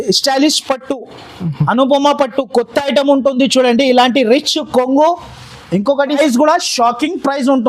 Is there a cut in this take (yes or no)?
yes